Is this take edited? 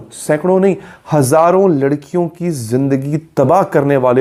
no; 0 cuts

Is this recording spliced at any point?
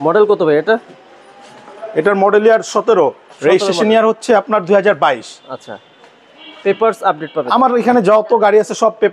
no; 0 cuts

